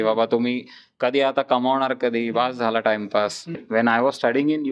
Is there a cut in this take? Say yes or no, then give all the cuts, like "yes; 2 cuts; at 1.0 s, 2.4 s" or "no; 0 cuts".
yes; 1 cut; at 3.5 s